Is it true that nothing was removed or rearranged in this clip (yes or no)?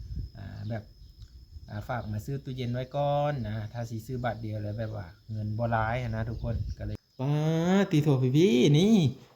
no